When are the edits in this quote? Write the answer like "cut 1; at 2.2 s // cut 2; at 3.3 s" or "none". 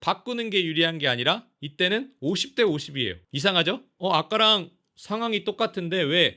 cut 1; at 3.2 s // cut 2; at 3.9 s